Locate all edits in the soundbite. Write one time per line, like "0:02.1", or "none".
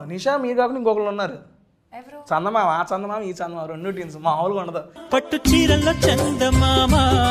none